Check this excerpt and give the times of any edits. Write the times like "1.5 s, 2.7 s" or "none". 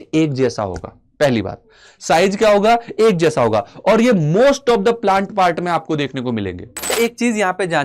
6.9 s